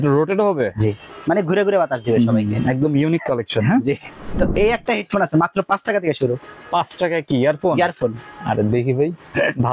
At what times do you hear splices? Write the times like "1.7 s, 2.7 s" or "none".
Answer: 1.1 s, 4.2 s